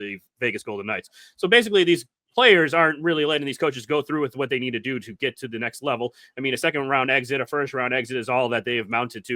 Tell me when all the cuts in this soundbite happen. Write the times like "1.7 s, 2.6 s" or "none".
none